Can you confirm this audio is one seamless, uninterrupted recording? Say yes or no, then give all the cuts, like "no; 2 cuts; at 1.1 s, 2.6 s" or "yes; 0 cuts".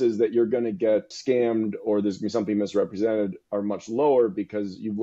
no; 1 cut; at 1.1 s